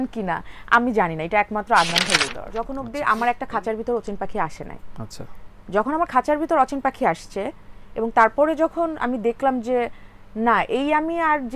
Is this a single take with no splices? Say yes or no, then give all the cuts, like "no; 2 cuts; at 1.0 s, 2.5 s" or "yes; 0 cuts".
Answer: no; 1 cut; at 2.4 s